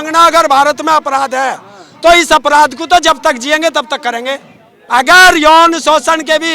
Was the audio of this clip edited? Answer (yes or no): yes